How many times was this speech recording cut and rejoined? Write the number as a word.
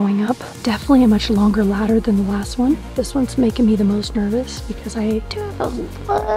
two